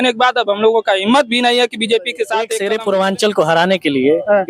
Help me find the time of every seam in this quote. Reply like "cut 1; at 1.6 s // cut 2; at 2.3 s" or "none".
cut 1; at 2.5 s